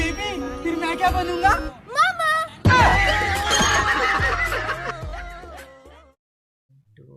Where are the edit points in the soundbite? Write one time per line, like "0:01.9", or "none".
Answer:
0:06.2